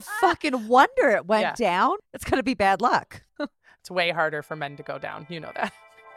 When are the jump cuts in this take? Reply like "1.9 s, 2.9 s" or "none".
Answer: 2.0 s